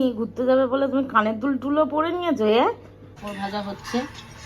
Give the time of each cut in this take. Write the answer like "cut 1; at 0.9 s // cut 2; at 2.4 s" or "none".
cut 1; at 3.3 s